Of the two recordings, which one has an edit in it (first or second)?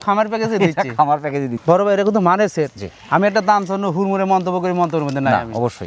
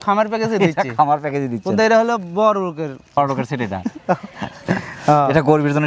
first